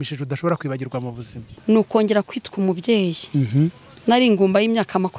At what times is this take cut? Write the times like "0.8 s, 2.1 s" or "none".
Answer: 1.5 s